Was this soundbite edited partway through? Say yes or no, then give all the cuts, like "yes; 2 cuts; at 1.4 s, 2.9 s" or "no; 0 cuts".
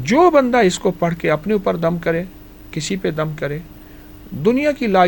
no; 0 cuts